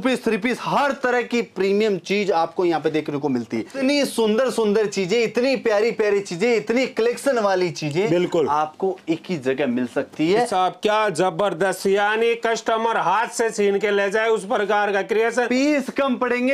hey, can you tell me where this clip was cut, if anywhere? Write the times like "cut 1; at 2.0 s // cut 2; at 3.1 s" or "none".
cut 1; at 3.8 s // cut 2; at 10.5 s